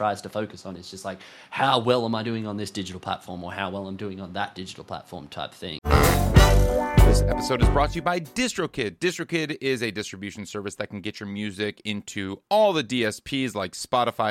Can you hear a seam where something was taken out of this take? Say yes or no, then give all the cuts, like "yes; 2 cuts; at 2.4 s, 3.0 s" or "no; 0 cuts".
yes; 1 cut; at 5.8 s